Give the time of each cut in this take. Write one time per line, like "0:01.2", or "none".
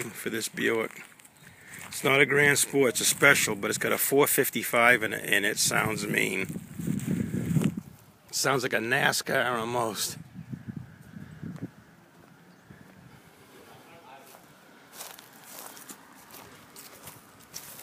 0:06.6